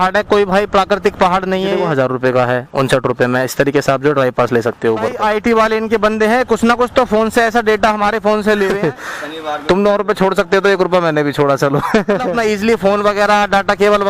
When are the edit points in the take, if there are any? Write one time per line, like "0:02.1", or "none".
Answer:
0:01.7
0:05.1
0:08.8
0:12.3